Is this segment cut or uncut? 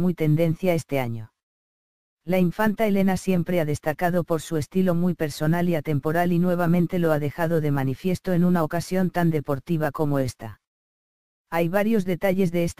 uncut